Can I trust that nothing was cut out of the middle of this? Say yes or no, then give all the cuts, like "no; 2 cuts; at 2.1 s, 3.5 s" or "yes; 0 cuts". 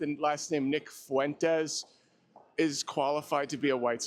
yes; 0 cuts